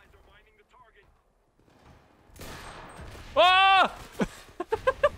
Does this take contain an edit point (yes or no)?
no